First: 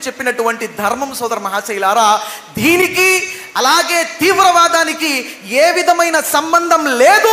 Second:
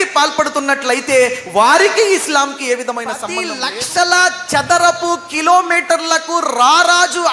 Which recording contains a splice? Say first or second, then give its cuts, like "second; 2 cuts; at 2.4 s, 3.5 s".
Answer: second; 1 cut; at 3.3 s